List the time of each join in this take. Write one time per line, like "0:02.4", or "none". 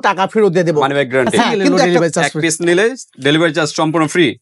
0:01.8

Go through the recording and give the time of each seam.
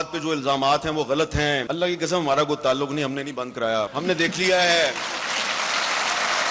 0:01.7
0:03.9

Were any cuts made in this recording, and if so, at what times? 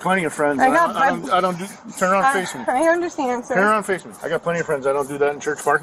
0:04.1

